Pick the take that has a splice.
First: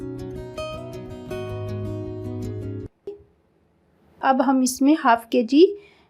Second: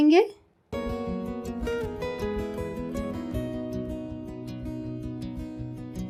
first; 1 cut; at 3.2 s

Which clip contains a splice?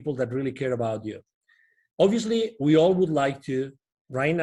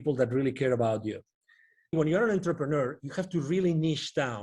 second; 1 cut; at 1.9 s

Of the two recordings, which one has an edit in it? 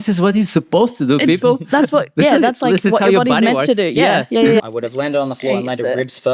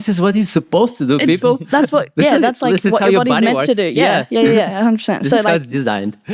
first; 1 cut; at 4.7 s

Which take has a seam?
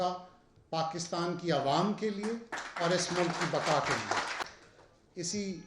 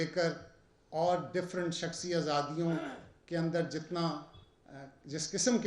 first; 1 cut; at 4.4 s

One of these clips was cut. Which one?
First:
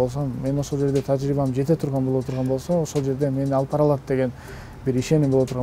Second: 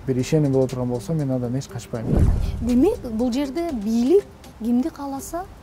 second; 1 cut; at 2.3 s

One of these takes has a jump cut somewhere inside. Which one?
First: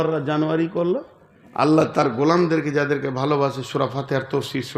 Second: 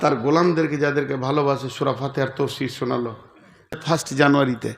second; 1 cut; at 3.8 s

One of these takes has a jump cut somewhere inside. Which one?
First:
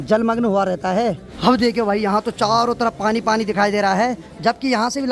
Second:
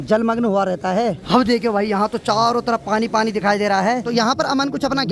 second; 2 cuts; at 1.2 s, 4.0 s

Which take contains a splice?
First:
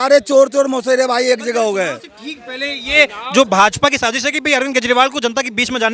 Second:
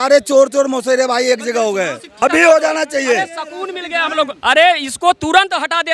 second; 1 cut; at 2.1 s

